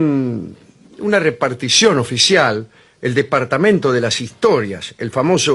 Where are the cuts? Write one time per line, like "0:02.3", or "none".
0:02.1